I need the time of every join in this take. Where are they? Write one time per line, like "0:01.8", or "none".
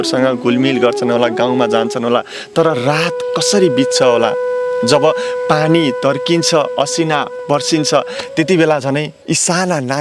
none

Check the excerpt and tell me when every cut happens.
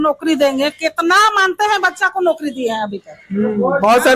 none

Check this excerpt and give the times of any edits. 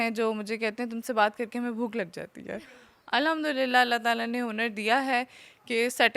0:02.6

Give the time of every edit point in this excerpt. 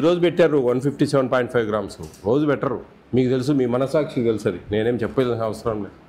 0:02.9

